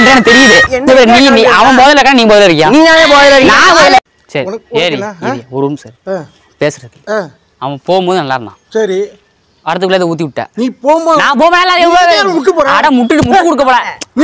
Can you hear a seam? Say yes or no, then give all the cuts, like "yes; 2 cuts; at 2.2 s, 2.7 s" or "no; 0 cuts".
yes; 1 cut; at 4.0 s